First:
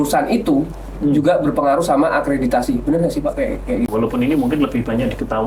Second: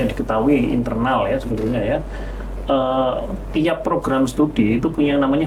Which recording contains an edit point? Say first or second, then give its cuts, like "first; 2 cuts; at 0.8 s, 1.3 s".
first; 1 cut; at 3.9 s